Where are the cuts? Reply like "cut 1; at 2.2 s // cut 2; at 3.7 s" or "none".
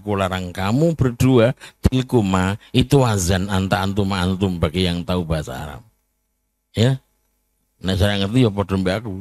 none